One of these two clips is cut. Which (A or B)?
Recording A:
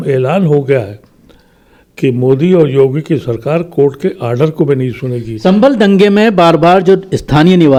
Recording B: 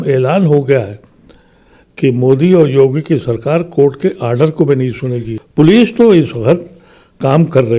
B